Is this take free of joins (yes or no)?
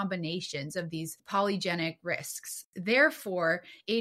no